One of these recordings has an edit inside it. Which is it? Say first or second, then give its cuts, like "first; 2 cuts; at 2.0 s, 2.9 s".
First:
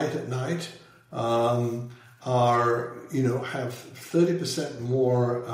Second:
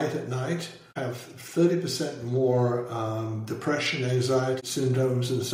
second; 2 cuts; at 0.9 s, 4.6 s